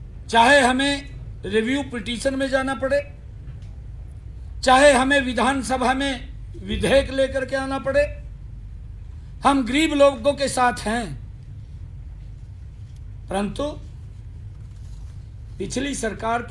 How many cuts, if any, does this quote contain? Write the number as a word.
zero